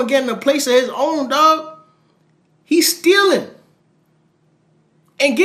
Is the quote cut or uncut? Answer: uncut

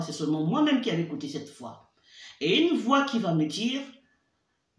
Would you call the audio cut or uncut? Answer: uncut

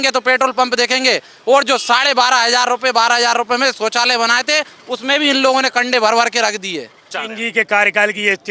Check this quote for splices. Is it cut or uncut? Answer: cut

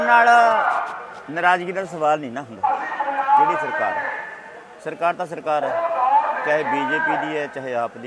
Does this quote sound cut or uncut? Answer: uncut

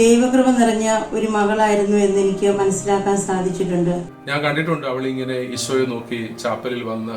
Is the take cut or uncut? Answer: cut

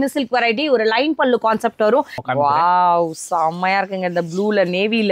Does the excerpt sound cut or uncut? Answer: cut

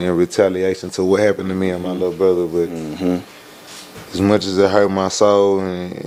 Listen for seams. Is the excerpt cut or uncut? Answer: uncut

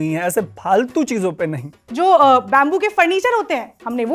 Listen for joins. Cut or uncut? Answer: cut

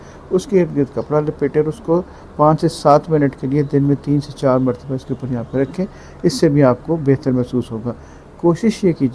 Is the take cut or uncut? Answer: uncut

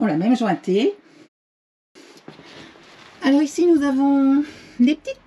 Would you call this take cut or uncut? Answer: cut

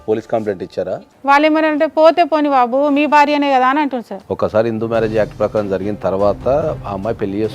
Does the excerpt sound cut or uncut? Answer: cut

